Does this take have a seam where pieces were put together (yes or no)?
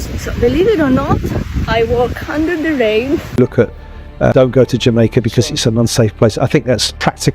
yes